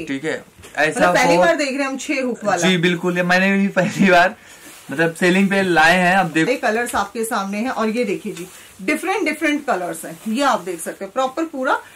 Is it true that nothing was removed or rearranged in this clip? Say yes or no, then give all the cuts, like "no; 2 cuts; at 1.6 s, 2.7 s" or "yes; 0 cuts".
no; 1 cut; at 6.5 s